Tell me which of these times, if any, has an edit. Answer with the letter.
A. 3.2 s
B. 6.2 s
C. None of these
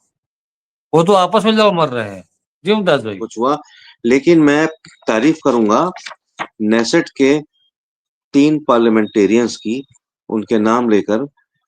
A